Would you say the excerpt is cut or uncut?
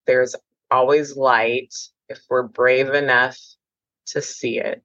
uncut